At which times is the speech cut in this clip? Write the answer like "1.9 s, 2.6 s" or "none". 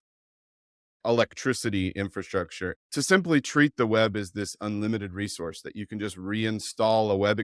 2.8 s